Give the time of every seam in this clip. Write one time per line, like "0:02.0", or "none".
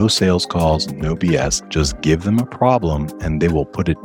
0:01.6